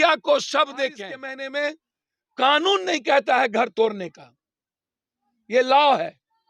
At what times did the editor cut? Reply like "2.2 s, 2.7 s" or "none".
1.3 s